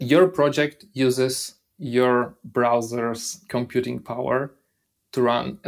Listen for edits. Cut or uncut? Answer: uncut